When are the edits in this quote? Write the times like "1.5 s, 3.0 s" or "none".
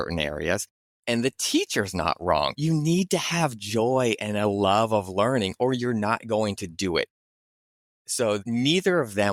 none